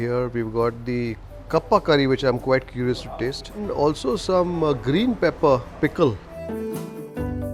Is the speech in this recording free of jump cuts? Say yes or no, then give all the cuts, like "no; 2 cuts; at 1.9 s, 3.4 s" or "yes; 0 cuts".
yes; 0 cuts